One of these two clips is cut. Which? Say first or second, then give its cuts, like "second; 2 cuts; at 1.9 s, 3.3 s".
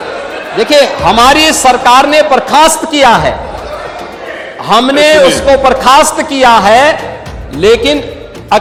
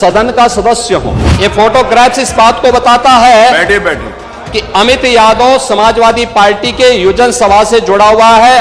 second; 1 cut; at 1.2 s